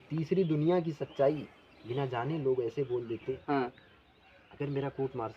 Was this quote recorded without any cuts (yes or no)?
no